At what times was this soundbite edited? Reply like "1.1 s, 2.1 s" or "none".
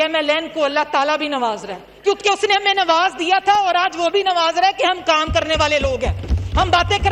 none